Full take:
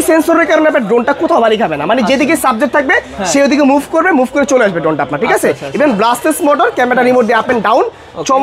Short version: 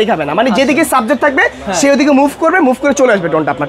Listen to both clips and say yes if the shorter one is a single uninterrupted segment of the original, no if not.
yes